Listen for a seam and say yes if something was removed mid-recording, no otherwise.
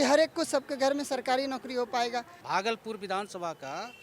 yes